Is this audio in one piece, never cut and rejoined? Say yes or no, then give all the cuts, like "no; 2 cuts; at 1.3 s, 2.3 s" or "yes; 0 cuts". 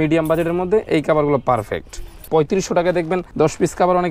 no; 2 cuts; at 2.3 s, 3.3 s